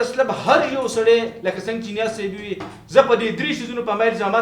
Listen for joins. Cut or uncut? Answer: uncut